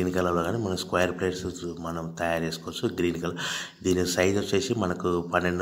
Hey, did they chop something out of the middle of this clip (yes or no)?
no